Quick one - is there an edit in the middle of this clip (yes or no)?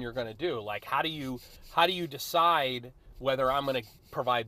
no